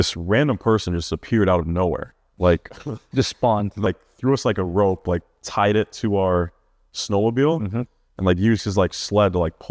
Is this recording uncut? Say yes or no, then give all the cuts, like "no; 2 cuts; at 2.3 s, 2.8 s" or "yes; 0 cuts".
no; 1 cut; at 3.9 s